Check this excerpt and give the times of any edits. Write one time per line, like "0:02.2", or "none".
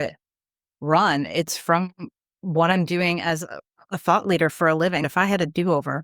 0:05.0